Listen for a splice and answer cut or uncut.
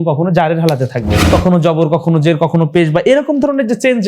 cut